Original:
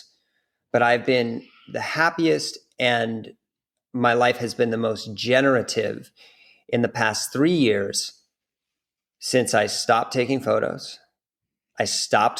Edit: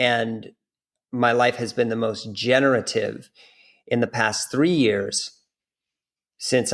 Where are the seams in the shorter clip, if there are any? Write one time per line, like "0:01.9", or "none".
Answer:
none